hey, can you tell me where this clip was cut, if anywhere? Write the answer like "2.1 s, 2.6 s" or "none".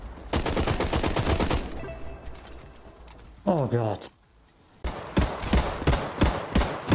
4.9 s